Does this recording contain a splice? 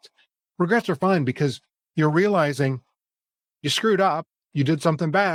no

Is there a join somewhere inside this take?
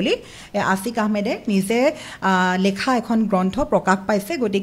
no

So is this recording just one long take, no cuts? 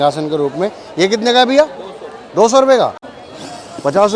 no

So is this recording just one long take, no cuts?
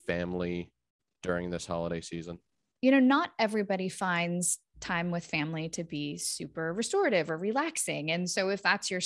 no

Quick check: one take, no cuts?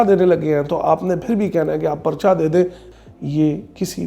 no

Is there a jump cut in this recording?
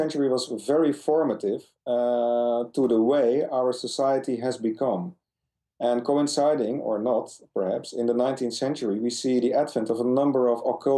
no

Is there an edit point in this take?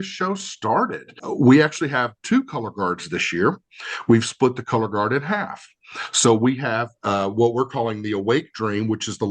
yes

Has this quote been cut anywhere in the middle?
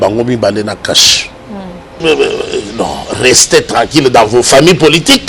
yes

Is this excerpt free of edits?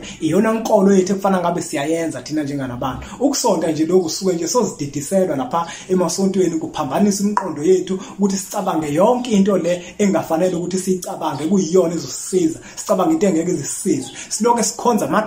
yes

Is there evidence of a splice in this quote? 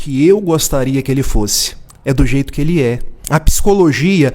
yes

